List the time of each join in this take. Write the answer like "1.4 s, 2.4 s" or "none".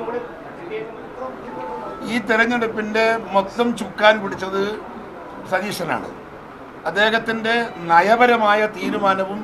0.9 s